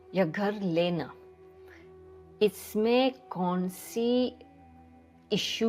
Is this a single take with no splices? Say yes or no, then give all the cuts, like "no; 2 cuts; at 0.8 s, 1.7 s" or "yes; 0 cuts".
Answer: yes; 0 cuts